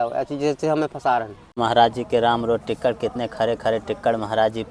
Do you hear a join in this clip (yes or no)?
yes